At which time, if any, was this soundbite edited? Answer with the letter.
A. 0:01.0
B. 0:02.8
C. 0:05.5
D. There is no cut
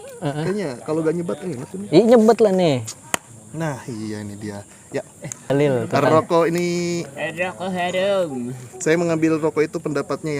C